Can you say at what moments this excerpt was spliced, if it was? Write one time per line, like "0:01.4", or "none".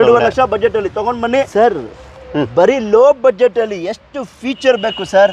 0:01.5